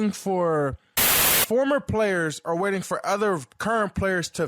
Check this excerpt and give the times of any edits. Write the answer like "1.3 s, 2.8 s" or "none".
1.3 s

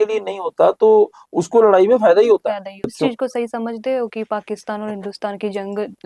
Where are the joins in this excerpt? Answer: 2.9 s

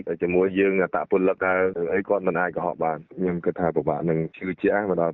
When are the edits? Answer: 3.1 s

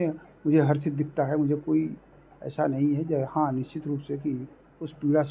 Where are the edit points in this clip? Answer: none

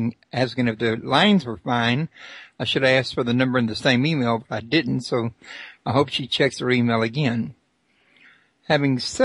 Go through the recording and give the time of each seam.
4.5 s

